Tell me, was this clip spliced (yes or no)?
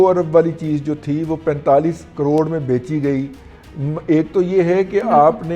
no